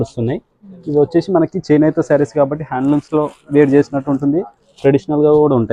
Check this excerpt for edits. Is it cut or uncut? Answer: uncut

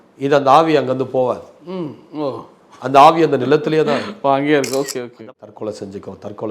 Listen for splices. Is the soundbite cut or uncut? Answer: cut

